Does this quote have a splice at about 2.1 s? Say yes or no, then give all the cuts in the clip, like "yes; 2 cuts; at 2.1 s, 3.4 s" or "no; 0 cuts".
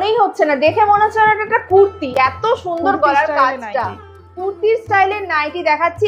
no; 0 cuts